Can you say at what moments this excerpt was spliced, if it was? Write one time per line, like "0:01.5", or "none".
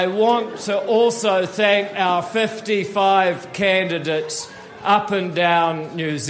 none